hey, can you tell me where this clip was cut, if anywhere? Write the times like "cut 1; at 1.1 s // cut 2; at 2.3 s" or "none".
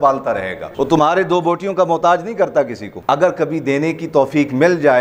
none